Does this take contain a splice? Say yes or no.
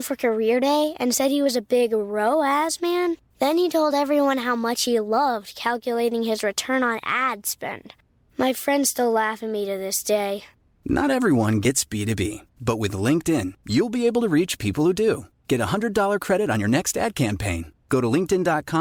no